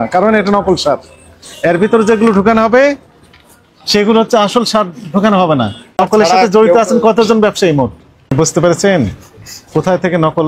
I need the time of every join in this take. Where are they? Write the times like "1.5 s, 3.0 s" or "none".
6.0 s, 8.3 s